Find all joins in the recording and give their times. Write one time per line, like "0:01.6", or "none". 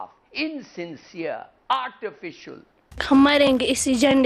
0:03.0

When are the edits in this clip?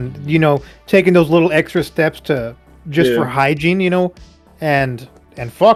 none

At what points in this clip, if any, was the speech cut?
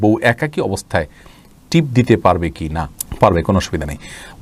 none

